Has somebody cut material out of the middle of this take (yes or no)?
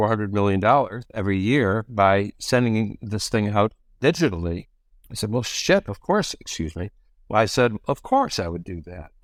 no